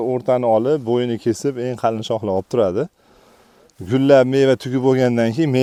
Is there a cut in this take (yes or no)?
no